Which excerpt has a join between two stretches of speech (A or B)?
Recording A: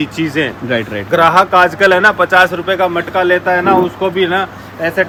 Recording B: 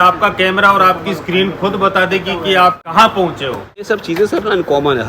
B